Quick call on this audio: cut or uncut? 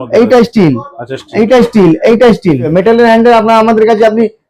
cut